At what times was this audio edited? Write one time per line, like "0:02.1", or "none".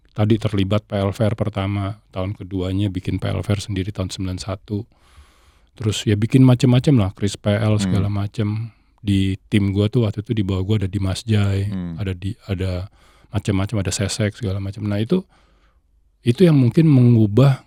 none

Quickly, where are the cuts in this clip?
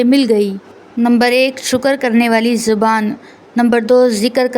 none

